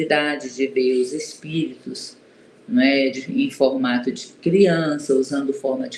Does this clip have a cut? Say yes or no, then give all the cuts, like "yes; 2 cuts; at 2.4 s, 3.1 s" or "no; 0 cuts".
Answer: no; 0 cuts